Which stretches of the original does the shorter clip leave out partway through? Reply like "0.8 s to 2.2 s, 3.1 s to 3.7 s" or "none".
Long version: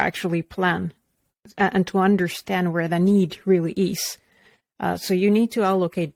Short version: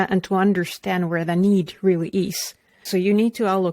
4.5 s to 5.0 s